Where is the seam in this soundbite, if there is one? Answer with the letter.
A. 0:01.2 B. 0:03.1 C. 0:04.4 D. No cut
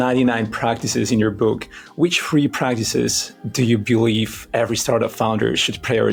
D